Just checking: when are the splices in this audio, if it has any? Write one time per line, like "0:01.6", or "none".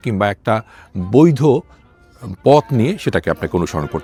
none